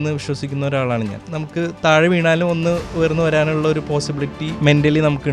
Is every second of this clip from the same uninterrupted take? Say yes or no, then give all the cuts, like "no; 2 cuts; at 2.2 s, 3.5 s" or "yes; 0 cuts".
no; 3 cuts; at 1.2 s, 2.9 s, 4.5 s